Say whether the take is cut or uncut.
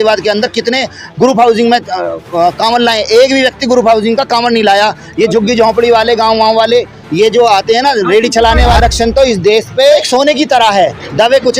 cut